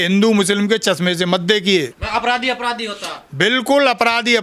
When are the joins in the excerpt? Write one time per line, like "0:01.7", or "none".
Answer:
none

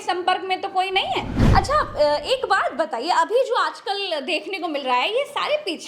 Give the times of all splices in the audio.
0:01.4

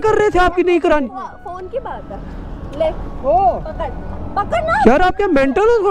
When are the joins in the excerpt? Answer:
none

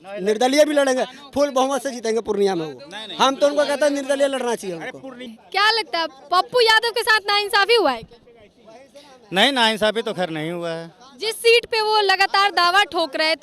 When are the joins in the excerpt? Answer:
none

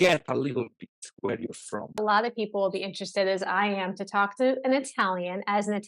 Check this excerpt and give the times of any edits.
0:02.0

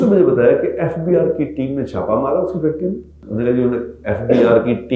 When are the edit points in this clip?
0:03.1

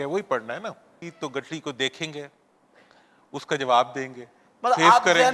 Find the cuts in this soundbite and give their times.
0:01.0

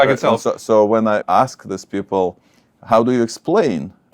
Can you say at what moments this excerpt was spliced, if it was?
0:01.2

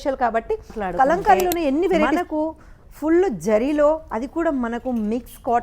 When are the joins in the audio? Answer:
0:02.1

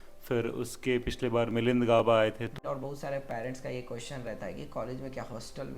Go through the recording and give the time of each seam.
0:02.5

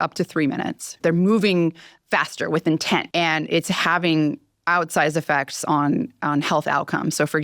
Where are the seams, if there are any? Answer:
0:01.0
0:03.1

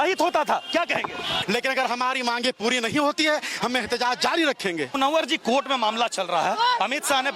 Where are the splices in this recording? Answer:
0:01.3
0:05.0

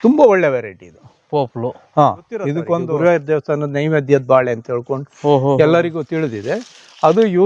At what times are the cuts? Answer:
0:02.9

